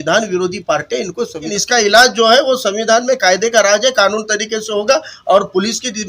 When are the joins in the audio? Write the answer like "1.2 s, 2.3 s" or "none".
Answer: 1.5 s